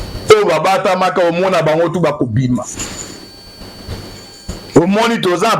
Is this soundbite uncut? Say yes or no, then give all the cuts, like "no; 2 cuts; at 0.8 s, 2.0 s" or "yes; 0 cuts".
yes; 0 cuts